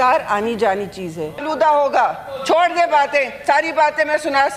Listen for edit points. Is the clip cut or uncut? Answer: cut